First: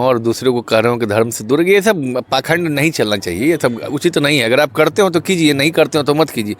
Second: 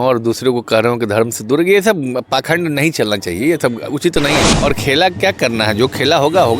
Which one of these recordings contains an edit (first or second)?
second